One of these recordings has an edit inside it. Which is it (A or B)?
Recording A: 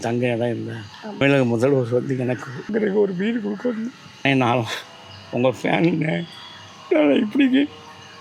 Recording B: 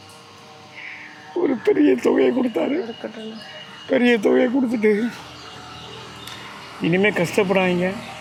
A